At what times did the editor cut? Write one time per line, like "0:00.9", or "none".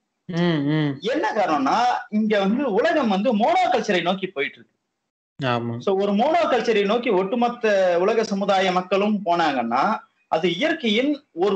none